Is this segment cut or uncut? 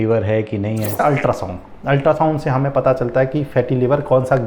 cut